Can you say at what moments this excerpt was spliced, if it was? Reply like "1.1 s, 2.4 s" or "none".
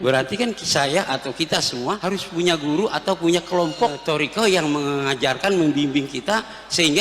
2.0 s, 4.0 s